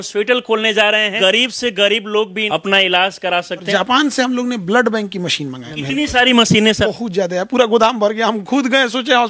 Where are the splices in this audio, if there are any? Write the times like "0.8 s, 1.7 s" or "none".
1.1 s, 2.4 s, 3.7 s, 5.7 s, 6.9 s